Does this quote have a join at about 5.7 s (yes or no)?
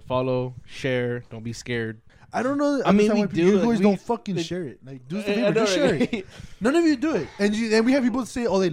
no